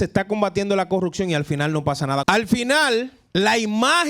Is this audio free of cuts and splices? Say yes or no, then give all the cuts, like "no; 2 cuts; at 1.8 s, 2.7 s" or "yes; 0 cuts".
no; 2 cuts; at 2.2 s, 3.2 s